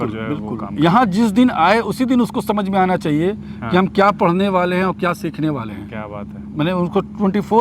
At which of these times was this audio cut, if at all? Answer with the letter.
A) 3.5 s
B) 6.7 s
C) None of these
C